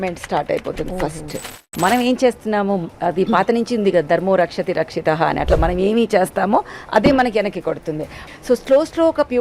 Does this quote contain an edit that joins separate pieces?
yes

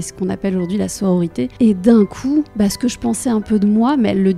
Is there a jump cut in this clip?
yes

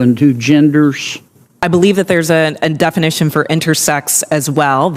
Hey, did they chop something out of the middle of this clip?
yes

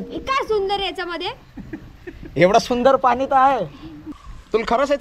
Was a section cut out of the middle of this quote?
no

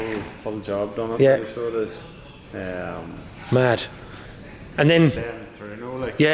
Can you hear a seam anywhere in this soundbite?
no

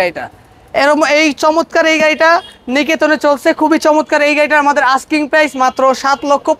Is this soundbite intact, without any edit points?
yes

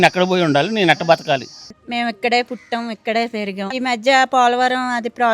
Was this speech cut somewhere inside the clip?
yes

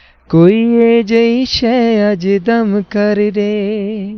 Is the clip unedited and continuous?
yes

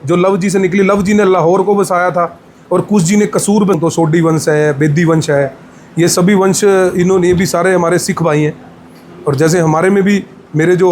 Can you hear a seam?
yes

